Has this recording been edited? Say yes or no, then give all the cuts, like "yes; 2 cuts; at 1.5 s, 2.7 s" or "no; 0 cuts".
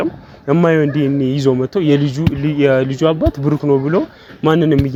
no; 0 cuts